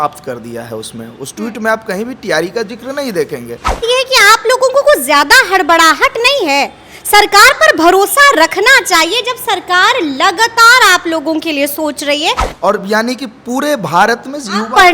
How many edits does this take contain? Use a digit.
2